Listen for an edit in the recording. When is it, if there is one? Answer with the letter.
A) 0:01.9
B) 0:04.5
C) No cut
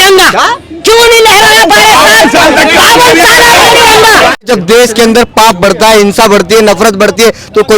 B